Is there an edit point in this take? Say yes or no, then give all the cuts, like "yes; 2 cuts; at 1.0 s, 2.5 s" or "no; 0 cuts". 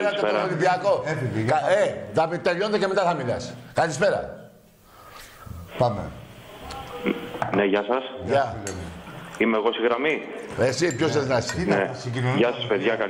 no; 0 cuts